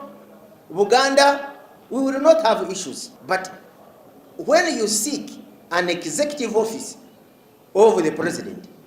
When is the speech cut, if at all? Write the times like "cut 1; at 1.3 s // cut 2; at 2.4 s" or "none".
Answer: cut 1; at 3.1 s